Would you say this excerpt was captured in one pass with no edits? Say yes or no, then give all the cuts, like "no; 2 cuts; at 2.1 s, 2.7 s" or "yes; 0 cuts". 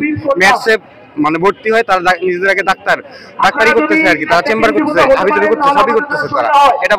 yes; 0 cuts